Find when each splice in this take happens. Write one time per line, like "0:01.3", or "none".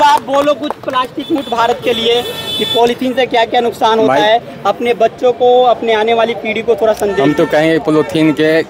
none